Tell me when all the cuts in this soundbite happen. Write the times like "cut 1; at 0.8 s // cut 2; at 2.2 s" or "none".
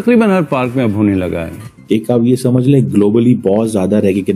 cut 1; at 1.6 s